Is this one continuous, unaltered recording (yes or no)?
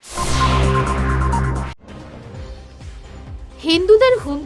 no